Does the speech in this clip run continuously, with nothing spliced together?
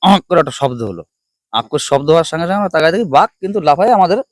yes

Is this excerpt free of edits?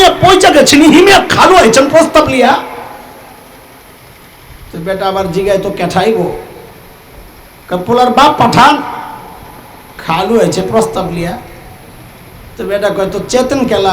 yes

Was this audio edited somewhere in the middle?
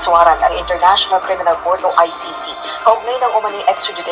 no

